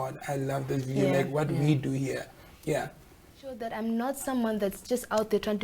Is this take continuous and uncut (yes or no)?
no